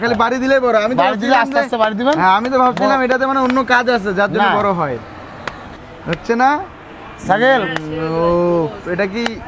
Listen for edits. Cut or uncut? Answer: uncut